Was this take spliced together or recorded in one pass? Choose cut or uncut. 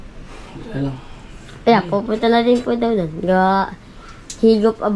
uncut